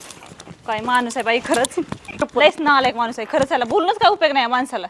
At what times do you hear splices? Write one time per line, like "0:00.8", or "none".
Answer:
0:02.2